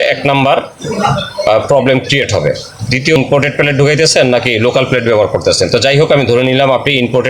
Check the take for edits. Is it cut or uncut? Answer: cut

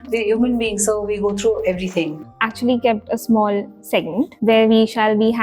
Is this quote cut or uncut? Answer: cut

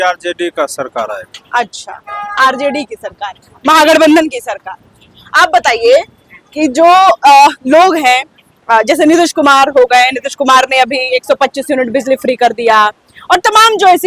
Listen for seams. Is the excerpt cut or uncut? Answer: uncut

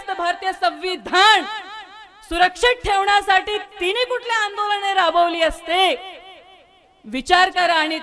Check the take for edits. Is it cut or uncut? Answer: uncut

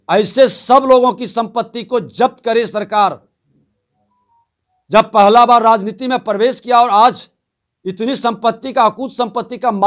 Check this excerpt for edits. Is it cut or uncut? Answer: uncut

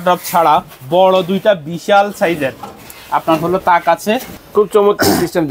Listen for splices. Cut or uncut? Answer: cut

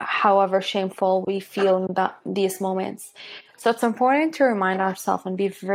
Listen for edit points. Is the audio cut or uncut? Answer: uncut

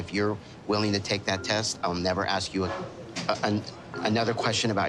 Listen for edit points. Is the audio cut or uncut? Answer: uncut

